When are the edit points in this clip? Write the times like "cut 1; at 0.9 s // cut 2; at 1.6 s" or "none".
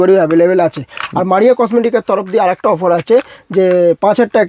none